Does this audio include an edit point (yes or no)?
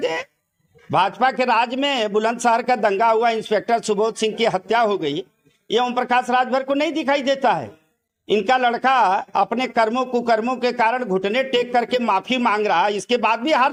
no